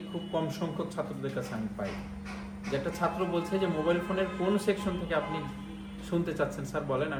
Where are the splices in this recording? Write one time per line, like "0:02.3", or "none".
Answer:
none

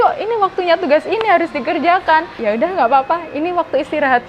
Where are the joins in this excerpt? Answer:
0:02.4

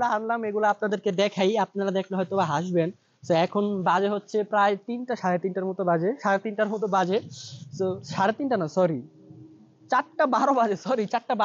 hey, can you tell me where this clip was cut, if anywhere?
none

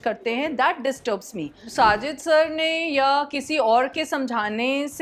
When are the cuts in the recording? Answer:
0:01.6

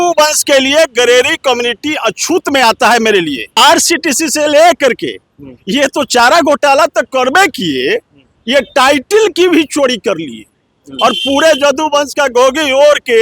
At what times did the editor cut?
0:03.6

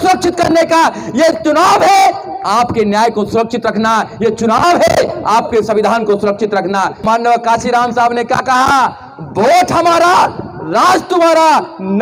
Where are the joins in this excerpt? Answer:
0:07.0

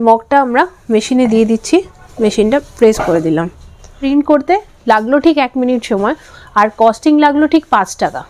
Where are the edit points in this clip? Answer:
0:02.0
0:04.0

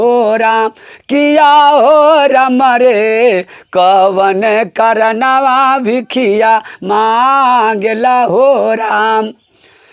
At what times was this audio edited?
none

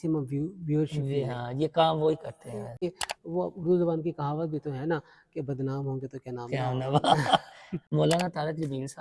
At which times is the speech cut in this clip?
0:02.8

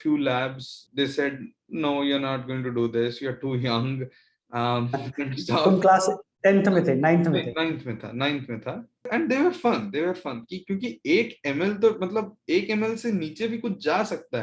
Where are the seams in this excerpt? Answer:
0:09.1

